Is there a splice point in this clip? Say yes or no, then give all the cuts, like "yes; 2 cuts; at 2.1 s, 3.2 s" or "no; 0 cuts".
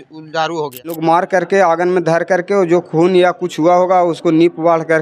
yes; 1 cut; at 1.0 s